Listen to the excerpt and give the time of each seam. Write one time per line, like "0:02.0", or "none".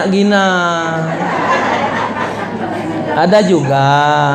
none